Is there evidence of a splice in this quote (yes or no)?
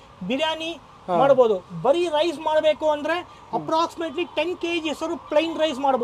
no